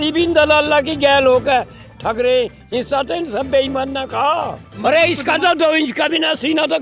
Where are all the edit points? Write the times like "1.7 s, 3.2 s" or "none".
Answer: 4.7 s